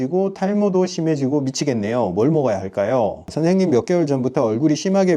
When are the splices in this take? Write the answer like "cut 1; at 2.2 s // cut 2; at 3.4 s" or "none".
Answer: cut 1; at 3.3 s